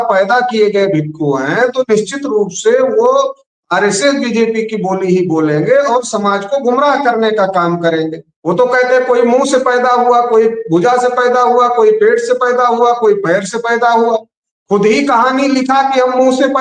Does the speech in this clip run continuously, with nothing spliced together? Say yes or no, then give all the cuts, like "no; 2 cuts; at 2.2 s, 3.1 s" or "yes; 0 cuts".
no; 1 cut; at 8.3 s